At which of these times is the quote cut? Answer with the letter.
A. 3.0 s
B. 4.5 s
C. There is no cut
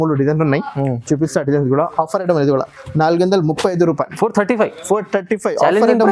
C